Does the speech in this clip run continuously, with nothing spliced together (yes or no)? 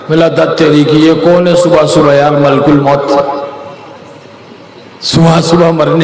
yes